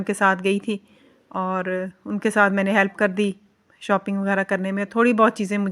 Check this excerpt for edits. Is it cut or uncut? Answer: uncut